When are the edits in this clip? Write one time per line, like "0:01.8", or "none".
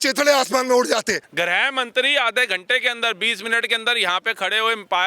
0:01.2